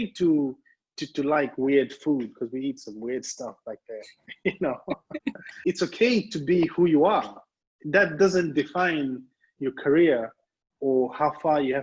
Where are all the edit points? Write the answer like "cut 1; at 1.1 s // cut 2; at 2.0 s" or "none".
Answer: cut 1; at 5.6 s